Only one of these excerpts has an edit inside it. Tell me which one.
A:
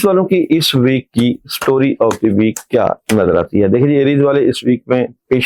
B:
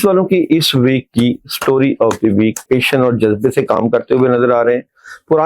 B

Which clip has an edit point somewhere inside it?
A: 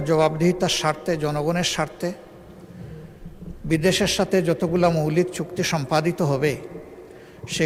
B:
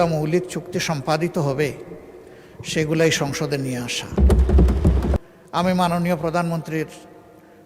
B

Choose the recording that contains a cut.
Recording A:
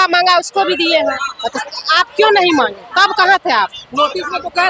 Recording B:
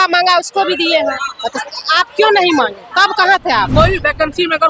B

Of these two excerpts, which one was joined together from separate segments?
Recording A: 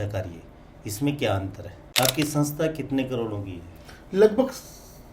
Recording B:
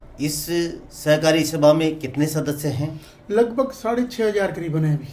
A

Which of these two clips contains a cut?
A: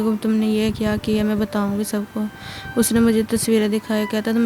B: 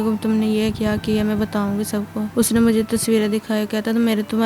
B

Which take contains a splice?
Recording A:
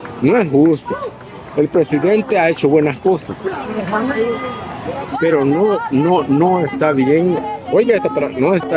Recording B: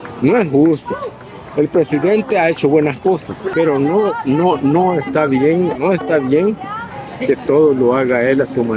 B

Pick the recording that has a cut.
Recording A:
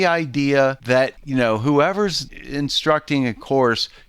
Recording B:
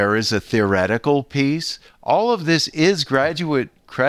A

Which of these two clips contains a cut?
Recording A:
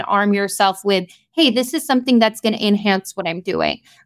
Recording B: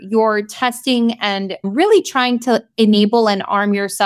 B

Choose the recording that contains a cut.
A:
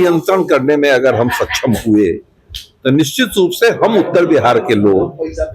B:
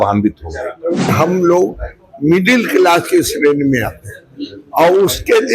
B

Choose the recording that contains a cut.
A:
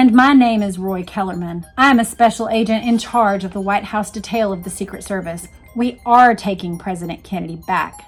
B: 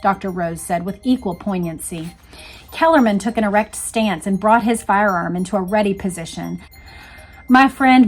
B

